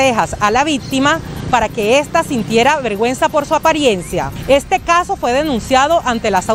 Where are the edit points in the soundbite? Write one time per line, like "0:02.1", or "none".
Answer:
0:04.3